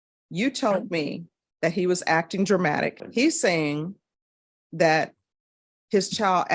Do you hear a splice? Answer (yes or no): yes